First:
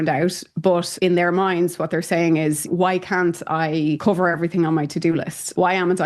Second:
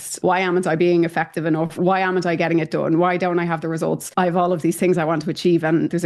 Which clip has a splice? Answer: second; 2 cuts; at 1.7 s, 4.1 s

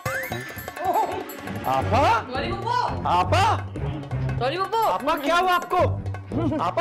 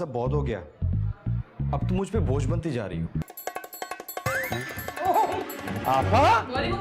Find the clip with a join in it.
second; 1 cut; at 3.2 s

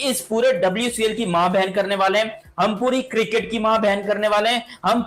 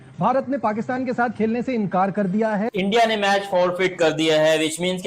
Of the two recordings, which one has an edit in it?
second; 1 cut; at 2.7 s

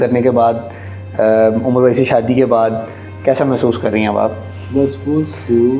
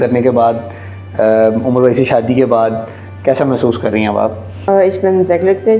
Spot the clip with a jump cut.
second; 1 cut; at 4.7 s

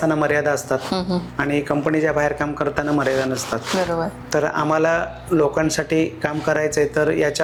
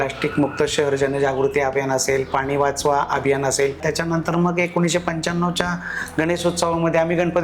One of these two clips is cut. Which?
second; 1 cut; at 3.8 s

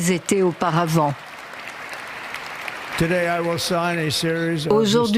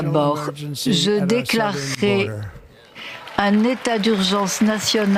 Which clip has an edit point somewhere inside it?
first; 1 cut; at 2.9 s

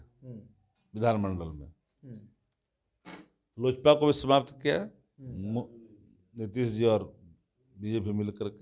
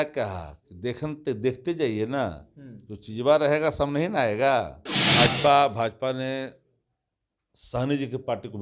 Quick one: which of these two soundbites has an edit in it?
second; 1 cut; at 5.0 s

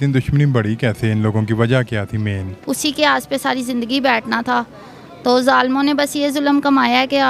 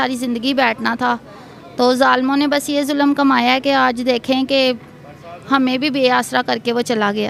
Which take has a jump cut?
first; 1 cut; at 2.5 s

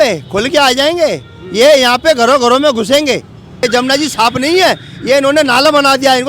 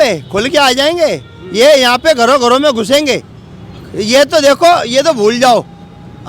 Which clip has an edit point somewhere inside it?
first; 1 cut; at 3.6 s

